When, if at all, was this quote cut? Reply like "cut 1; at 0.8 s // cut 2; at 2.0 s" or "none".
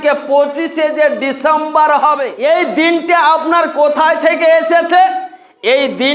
cut 1; at 2.3 s